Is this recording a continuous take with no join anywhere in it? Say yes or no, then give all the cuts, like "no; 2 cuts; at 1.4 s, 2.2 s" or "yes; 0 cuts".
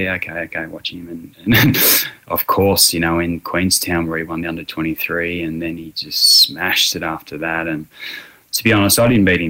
yes; 0 cuts